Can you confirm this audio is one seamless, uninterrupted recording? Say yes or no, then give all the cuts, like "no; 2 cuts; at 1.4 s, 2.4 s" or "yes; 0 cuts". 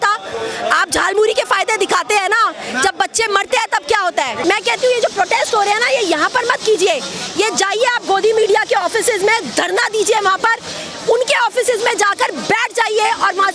no; 1 cut; at 4.4 s